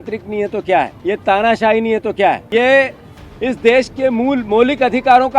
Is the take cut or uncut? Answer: cut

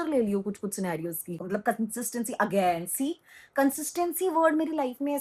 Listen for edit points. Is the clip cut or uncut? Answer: cut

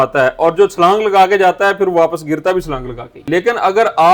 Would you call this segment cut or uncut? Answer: cut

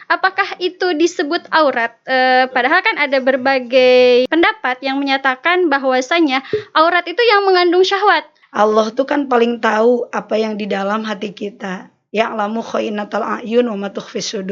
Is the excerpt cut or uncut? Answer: cut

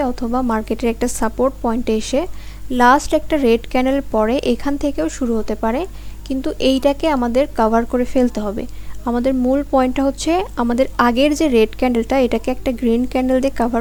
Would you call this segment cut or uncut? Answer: uncut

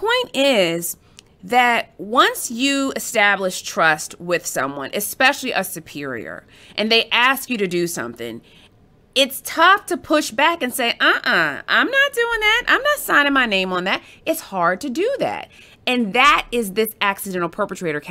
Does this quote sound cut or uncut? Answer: uncut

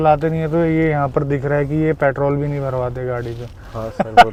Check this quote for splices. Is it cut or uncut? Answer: uncut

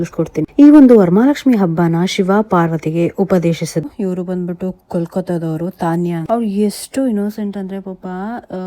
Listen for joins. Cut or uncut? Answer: cut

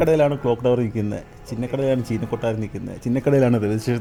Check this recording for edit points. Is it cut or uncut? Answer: uncut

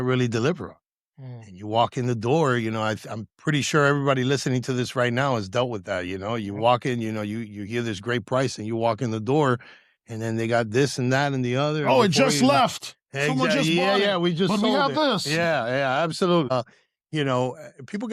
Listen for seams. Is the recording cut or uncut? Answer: cut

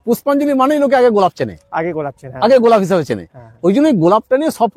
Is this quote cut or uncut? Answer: uncut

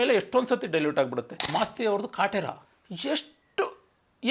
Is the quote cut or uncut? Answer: cut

